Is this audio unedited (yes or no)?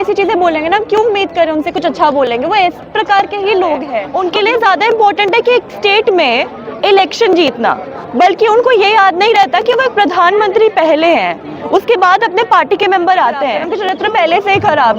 no